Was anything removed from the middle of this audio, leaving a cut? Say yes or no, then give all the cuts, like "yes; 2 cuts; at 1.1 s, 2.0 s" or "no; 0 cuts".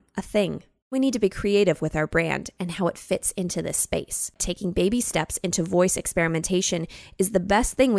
yes; 2 cuts; at 0.9 s, 4.4 s